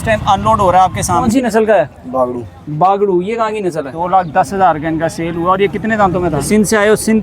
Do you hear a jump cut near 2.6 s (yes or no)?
no